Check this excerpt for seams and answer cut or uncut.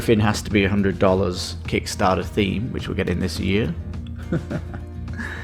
uncut